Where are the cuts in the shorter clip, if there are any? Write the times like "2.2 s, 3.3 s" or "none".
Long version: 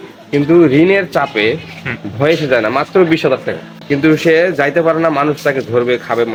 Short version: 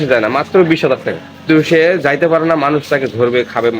1.3 s